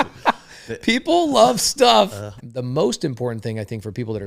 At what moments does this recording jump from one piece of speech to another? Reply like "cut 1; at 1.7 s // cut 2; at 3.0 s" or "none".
cut 1; at 2.5 s

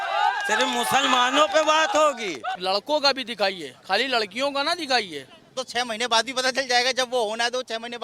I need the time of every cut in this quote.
cut 1; at 2.5 s // cut 2; at 5.4 s

